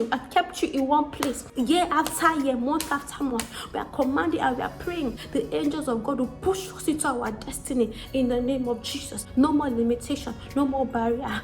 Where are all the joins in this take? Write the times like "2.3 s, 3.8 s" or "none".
1.4 s, 5.2 s, 9.2 s